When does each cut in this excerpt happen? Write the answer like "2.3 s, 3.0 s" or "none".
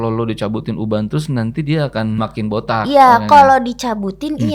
2.2 s